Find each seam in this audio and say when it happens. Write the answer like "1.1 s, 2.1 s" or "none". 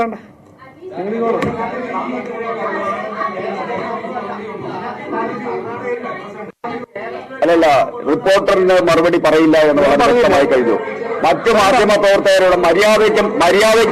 none